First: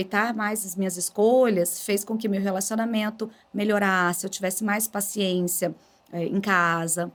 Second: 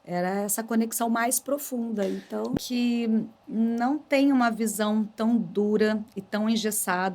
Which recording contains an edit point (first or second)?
second